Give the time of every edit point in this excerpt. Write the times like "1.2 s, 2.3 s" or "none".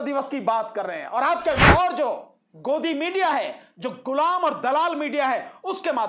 1.7 s